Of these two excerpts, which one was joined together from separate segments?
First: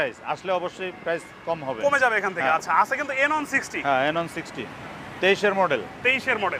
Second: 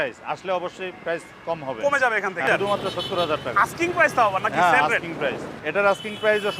second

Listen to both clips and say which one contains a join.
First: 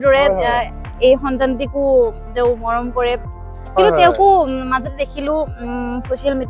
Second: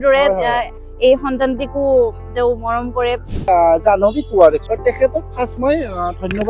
second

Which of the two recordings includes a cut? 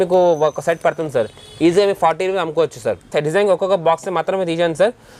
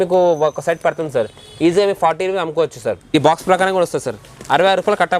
second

